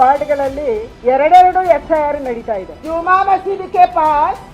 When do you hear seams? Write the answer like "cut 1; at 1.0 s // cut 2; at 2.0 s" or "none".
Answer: cut 1; at 2.8 s